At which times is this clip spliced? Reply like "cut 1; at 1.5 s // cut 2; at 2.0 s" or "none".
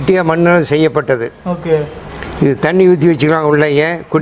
none